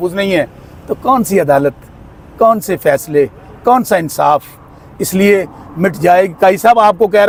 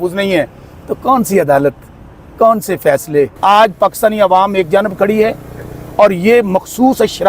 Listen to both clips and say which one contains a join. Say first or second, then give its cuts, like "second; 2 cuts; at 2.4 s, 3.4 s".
second; 1 cut; at 3.3 s